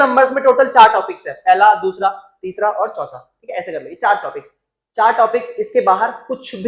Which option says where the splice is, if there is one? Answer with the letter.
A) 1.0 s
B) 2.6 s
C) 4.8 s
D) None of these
D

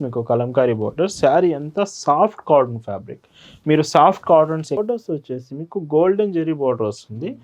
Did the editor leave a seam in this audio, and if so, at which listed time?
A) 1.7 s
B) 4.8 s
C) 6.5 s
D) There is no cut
B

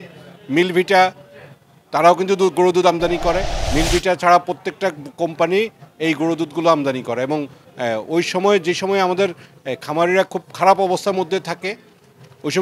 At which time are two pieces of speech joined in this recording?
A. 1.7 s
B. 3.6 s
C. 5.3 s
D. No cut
B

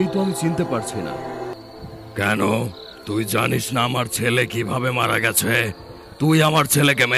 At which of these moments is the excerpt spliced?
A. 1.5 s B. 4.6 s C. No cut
A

